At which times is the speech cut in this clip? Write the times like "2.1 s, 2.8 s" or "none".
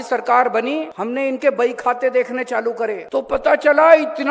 0.9 s, 3.0 s